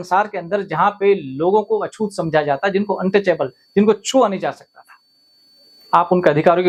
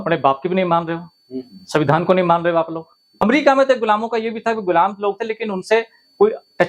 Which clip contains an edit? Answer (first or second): second